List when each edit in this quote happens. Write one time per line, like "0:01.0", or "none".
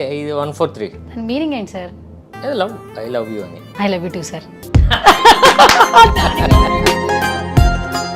0:01.0